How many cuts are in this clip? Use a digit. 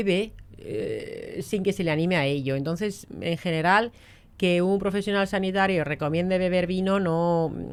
0